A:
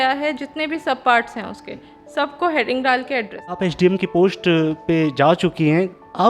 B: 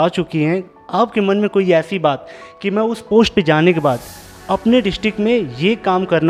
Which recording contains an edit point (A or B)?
A